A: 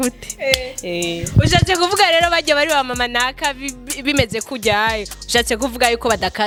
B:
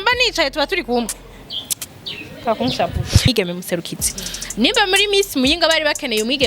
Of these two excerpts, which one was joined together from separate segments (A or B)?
B